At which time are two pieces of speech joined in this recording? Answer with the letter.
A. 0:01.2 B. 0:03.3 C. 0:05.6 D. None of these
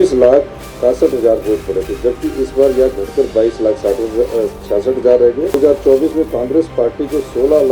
C